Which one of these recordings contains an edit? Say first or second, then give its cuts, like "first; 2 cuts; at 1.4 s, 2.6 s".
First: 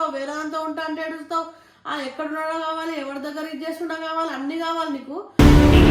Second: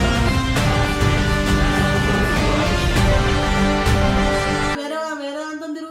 second; 1 cut; at 4.8 s